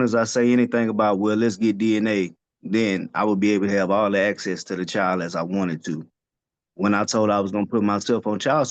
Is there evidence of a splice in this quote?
no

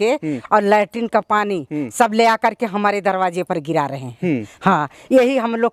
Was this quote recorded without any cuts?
yes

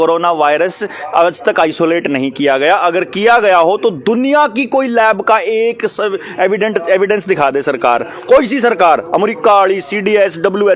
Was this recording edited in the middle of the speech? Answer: no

